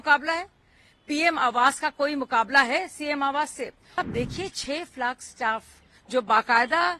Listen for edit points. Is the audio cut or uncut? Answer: cut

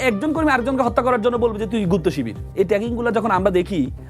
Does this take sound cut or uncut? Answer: cut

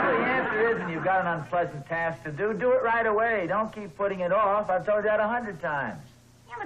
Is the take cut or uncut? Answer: cut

